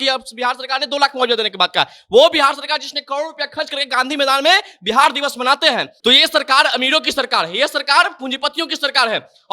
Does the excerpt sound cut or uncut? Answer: cut